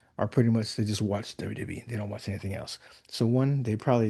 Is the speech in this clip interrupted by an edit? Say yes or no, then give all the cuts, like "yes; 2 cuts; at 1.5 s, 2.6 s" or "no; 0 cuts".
no; 0 cuts